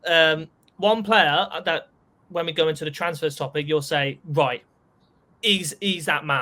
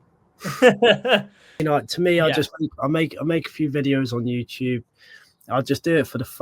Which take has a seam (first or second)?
second